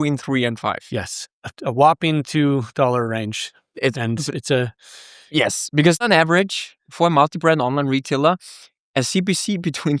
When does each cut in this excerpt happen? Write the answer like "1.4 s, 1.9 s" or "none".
6.0 s